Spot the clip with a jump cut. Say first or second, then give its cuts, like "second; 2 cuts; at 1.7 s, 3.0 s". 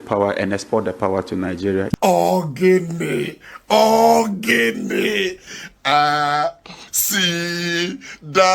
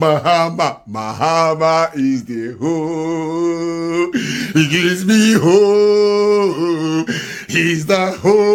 first; 1 cut; at 2.0 s